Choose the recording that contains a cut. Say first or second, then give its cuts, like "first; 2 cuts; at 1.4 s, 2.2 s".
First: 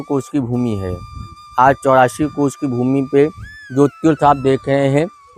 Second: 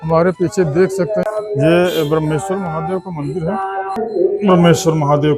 second; 2 cuts; at 1.2 s, 4.0 s